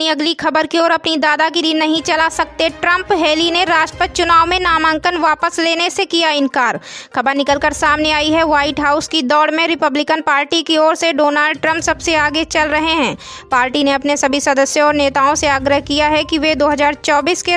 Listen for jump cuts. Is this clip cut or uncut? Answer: uncut